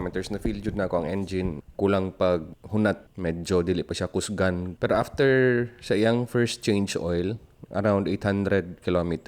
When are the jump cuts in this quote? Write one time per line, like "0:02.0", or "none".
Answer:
0:01.6
0:03.1
0:04.7